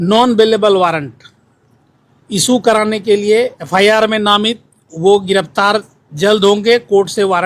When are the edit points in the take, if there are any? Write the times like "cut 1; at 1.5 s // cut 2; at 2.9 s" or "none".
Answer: cut 1; at 3.6 s